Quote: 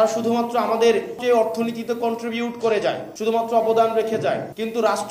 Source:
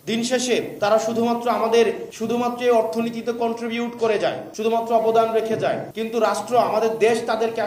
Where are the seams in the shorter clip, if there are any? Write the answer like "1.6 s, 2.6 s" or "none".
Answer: 1.2 s